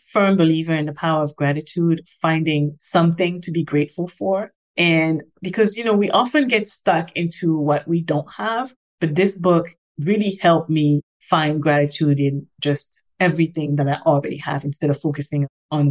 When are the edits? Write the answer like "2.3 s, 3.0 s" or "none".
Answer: 2.8 s